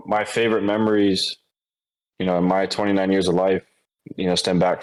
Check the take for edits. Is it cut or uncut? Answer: uncut